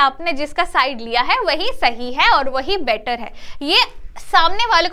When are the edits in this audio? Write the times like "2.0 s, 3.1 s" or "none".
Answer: none